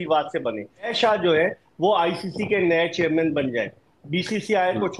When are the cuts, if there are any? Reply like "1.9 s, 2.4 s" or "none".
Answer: 0.9 s